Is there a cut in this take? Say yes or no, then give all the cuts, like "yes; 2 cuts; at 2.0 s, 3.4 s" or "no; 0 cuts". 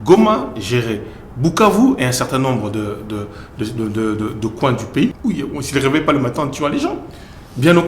yes; 1 cut; at 5.2 s